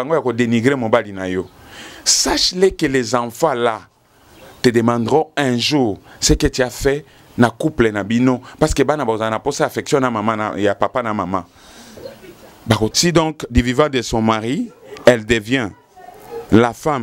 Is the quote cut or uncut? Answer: cut